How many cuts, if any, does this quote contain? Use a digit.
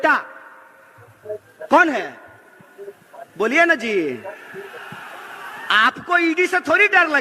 0